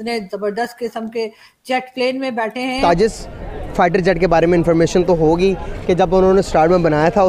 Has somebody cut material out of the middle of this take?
yes; 1 cut; at 2.8 s

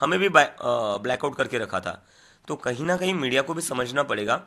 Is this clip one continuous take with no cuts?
yes; 0 cuts

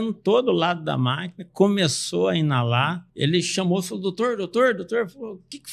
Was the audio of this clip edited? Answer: yes; 1 cut; at 3.0 s

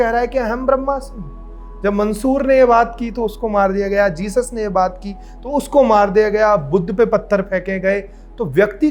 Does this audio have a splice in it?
no; 0 cuts

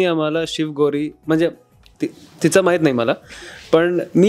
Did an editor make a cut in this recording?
no; 0 cuts

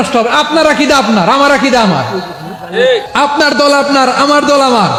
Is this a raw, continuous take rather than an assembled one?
yes; 0 cuts

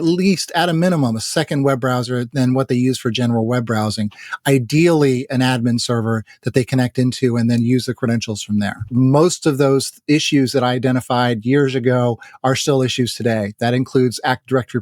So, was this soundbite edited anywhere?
yes; 1 cut; at 8.9 s

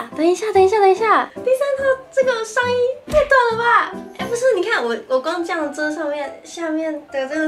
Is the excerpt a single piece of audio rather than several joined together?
no; 1 cut; at 1.3 s

